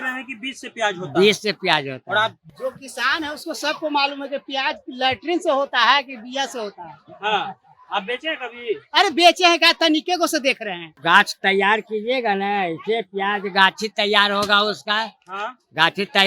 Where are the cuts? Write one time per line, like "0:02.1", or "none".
0:02.4
0:11.0